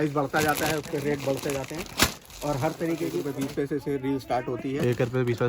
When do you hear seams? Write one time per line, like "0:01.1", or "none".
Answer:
0:03.2